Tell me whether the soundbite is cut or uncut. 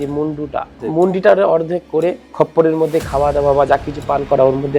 cut